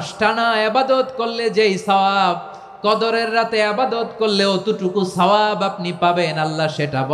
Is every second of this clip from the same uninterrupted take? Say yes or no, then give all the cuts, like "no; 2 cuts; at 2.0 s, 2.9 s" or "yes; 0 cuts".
yes; 0 cuts